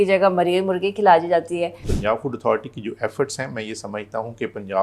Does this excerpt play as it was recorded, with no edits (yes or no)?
no